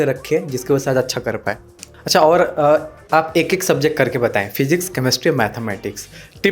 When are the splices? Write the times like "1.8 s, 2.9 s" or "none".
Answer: 2.0 s

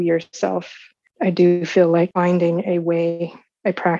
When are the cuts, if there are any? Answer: 1.0 s, 2.1 s

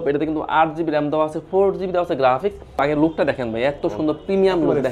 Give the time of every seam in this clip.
2.8 s

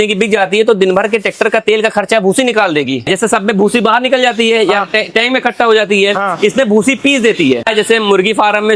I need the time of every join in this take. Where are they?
3.1 s, 7.7 s

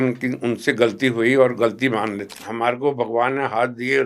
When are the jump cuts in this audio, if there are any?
2.5 s

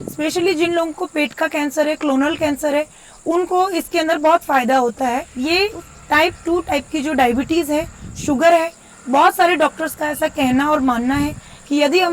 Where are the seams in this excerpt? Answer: 5.3 s

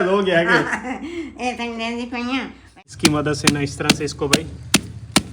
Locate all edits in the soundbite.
2.9 s

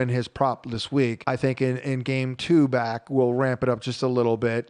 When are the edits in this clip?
1.2 s

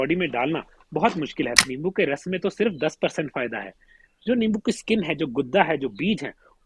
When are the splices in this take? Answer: 1.6 s

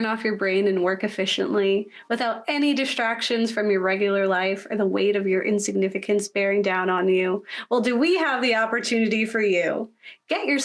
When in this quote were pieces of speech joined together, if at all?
none

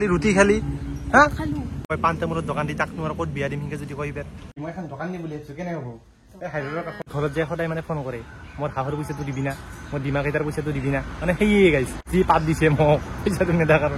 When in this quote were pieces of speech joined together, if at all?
1.9 s, 4.6 s, 7.1 s, 12.0 s

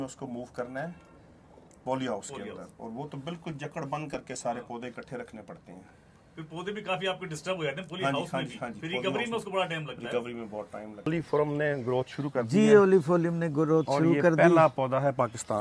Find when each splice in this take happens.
11.1 s

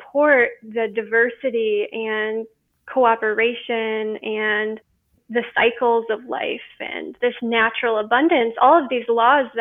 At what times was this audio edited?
none

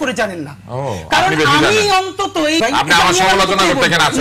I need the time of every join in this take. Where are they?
2.6 s

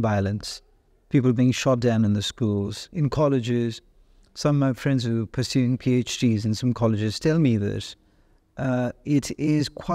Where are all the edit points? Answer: none

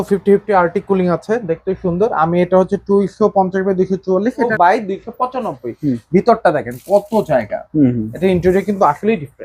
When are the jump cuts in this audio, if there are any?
4.5 s

